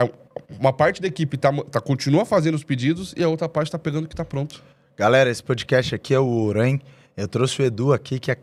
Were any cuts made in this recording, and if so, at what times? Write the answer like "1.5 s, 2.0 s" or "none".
none